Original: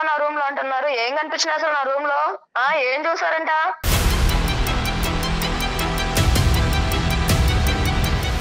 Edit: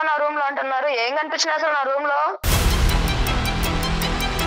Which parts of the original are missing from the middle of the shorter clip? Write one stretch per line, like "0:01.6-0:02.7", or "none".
0:02.4-0:03.8

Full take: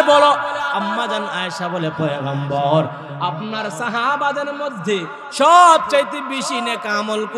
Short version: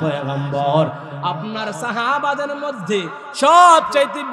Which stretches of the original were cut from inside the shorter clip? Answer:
none

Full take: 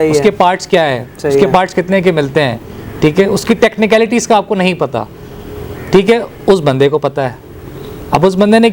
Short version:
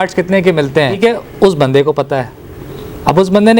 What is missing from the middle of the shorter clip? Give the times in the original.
0:02.6-0:06.0

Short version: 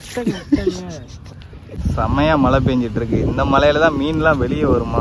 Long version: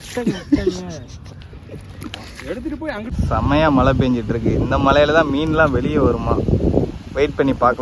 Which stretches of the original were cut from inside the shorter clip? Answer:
0:01.7-0:03.1

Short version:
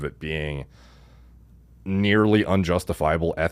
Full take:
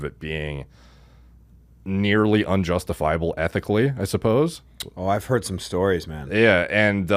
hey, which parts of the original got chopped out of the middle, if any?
none

